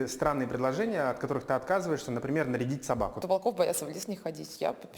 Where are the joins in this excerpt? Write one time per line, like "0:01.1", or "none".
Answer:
0:03.2